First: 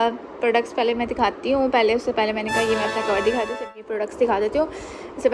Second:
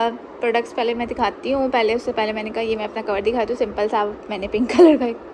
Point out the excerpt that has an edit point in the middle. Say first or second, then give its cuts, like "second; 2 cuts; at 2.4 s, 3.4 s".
first; 1 cut; at 3.8 s